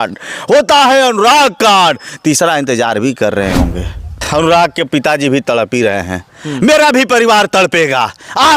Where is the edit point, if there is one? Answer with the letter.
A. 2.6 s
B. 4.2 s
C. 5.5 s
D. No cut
B